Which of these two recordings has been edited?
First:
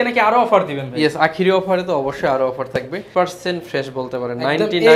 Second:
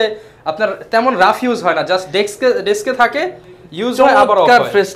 first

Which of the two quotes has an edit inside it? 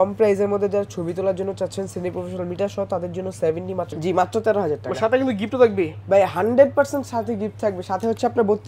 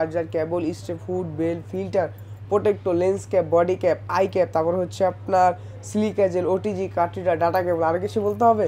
first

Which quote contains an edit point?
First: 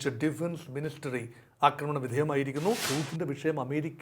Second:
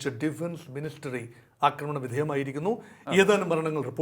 first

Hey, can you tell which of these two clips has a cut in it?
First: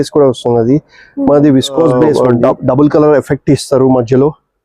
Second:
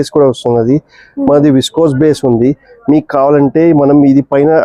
first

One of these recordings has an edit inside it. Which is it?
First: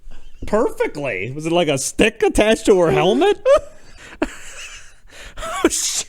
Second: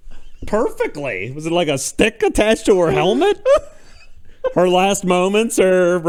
first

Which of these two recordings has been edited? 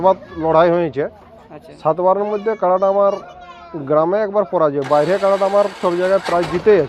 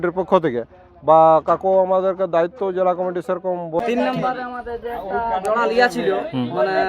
second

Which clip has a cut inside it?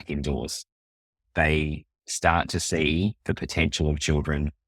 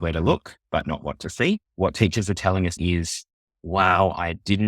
second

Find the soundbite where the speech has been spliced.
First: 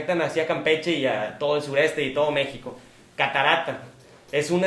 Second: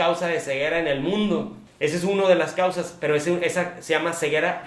second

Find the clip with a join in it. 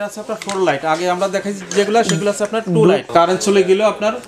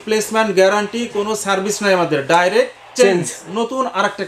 first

